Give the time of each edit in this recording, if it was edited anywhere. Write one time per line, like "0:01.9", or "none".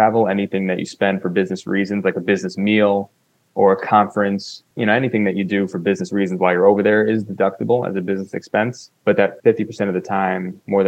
0:04.6
0:09.2